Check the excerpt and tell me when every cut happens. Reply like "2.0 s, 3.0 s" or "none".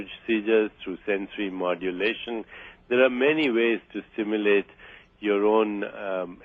3.9 s